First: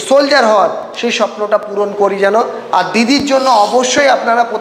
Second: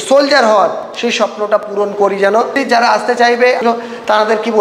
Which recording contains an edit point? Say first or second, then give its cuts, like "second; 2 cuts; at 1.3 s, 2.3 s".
second; 2 cuts; at 2.6 s, 3.6 s